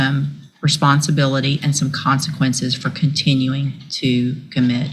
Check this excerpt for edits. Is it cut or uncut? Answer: uncut